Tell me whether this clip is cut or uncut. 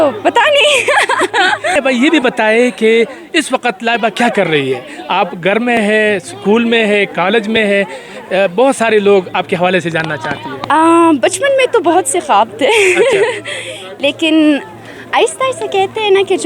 cut